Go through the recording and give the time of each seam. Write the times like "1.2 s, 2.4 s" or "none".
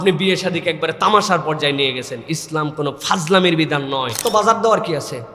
4.2 s

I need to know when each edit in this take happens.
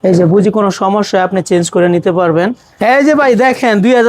2.6 s

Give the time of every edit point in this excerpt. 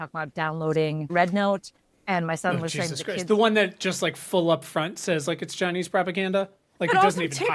1.1 s

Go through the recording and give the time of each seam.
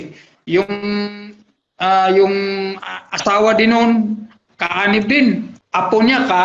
5.6 s

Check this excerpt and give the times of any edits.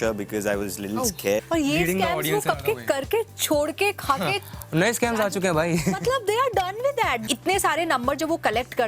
1.4 s, 7.2 s

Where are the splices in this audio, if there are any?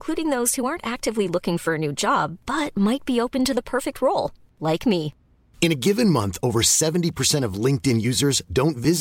none

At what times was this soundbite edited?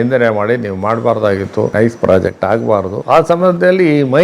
1.7 s, 2.9 s

